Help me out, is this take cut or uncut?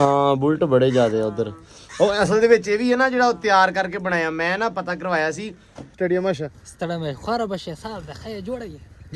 cut